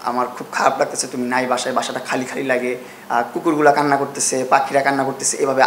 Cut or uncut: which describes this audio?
uncut